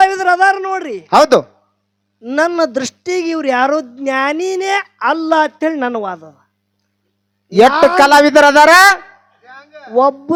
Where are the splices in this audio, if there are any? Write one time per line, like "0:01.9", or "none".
none

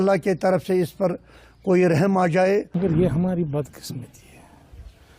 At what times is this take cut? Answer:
0:02.7

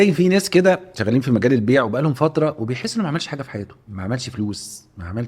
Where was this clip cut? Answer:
0:00.9
0:03.8

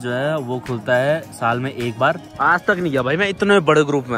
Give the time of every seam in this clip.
0:02.3

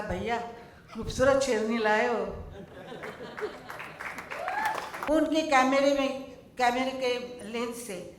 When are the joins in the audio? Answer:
0:05.0

